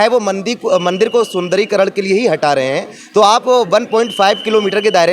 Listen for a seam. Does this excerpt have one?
no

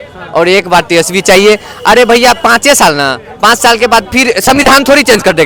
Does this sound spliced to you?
no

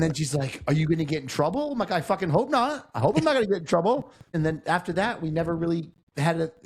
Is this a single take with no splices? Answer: no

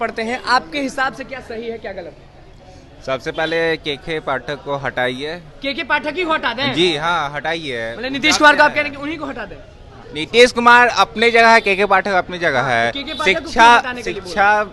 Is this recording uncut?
yes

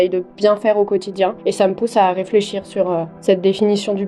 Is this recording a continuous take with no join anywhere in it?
no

